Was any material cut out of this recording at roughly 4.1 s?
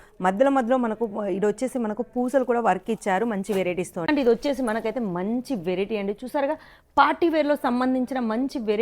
yes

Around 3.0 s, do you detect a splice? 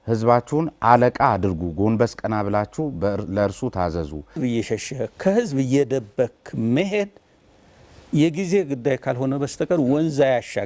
no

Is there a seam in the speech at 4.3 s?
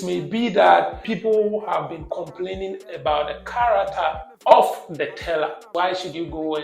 yes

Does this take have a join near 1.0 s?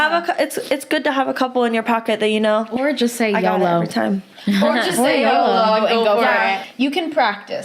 no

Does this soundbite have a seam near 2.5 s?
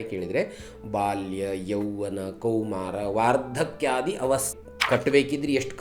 no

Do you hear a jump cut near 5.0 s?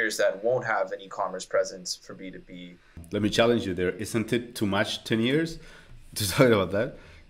no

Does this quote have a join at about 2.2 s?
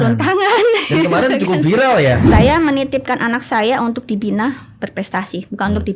yes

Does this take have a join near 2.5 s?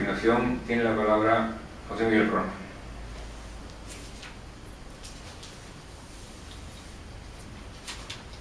no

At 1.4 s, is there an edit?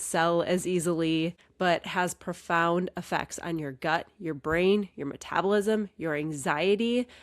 yes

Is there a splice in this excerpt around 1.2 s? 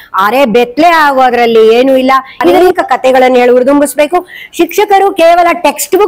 no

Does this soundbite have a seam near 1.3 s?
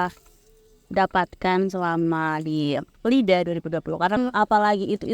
no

